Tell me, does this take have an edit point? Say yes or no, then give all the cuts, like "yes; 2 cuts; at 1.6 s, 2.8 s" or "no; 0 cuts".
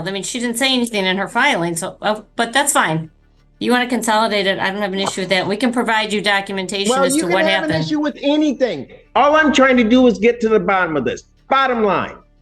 no; 0 cuts